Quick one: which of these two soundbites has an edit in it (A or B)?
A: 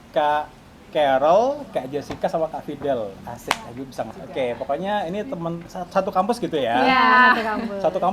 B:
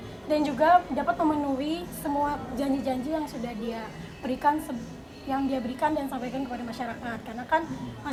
A